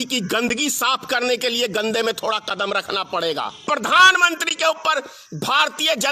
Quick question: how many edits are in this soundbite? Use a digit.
1